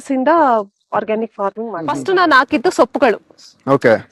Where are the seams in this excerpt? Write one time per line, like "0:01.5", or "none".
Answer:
0:01.9